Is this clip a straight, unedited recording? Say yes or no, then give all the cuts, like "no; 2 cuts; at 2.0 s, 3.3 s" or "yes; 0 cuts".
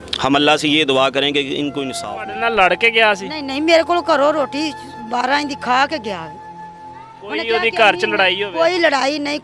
no; 1 cut; at 1.9 s